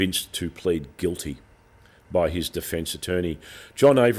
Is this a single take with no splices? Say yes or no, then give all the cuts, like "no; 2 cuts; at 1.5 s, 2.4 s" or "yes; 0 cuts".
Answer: yes; 0 cuts